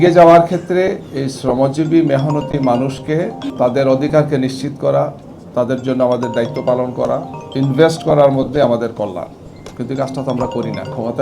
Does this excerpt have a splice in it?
yes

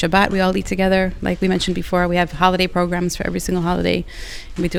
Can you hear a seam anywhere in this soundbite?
no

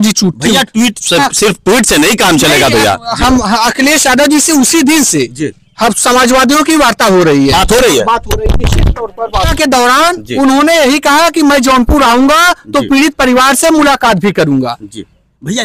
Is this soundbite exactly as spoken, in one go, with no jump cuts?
yes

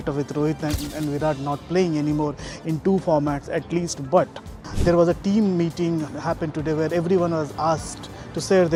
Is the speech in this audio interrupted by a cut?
no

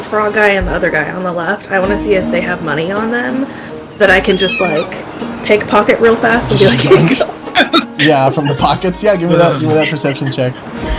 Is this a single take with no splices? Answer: yes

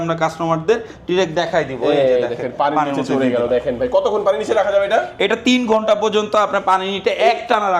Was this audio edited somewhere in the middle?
no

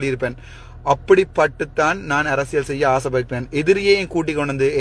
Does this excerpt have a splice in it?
no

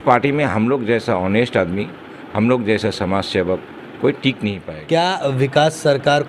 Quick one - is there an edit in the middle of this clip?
yes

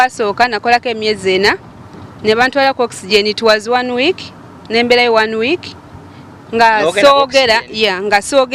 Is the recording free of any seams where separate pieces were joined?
yes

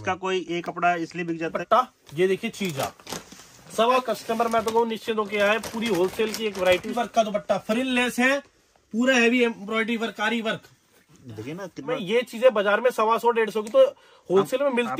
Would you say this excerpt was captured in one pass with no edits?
no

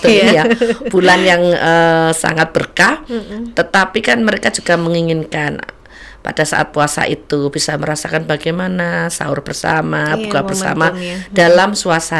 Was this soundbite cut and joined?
no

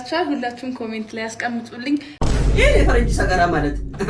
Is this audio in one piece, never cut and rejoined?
no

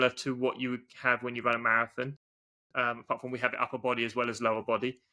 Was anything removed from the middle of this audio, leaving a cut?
no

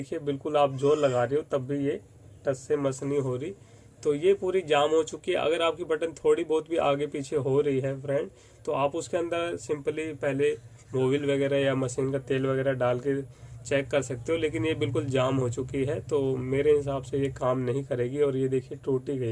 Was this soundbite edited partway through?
no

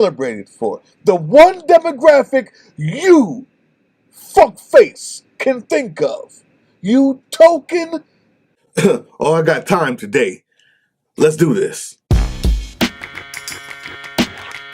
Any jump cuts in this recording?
yes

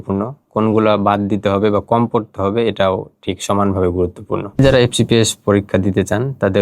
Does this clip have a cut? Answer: yes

